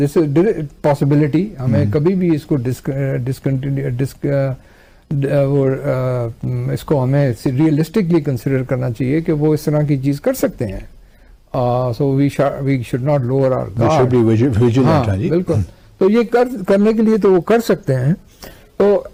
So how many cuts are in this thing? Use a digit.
0